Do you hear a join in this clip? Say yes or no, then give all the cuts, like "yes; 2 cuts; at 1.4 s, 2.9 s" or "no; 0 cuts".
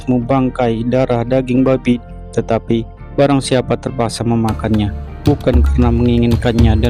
yes; 1 cut; at 2.0 s